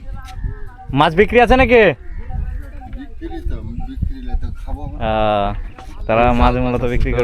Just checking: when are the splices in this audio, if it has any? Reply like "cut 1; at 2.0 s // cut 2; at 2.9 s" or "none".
none